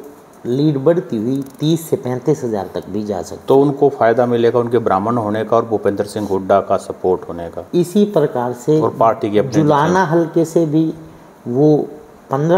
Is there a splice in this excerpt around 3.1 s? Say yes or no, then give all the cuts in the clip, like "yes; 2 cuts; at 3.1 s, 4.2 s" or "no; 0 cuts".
no; 0 cuts